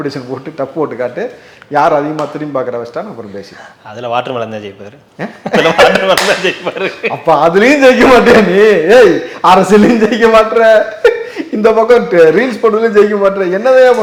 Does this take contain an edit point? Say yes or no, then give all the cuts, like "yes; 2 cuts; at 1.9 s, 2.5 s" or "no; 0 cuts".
no; 0 cuts